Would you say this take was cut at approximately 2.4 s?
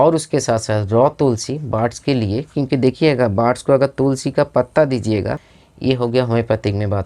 no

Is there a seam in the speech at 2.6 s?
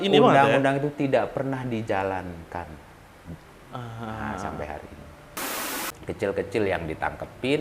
no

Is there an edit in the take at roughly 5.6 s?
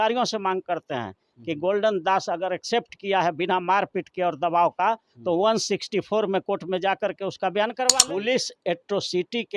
no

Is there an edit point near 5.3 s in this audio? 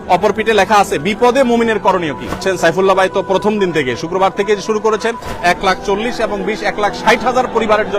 yes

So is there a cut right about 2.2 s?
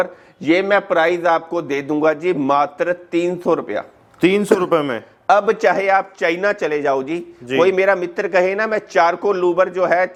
no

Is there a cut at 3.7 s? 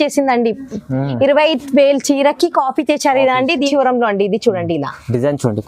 yes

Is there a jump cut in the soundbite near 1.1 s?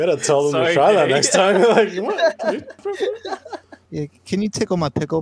no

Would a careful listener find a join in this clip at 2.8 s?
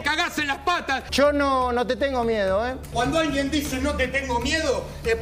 yes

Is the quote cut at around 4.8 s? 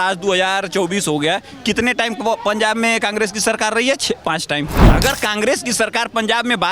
yes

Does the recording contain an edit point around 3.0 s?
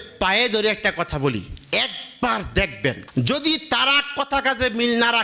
yes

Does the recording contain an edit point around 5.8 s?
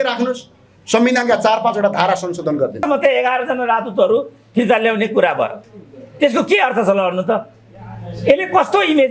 no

